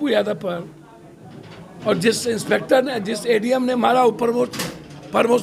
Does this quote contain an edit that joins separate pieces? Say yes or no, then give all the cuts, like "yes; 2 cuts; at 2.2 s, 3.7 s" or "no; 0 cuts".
no; 0 cuts